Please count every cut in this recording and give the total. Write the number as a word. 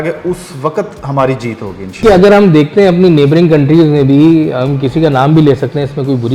one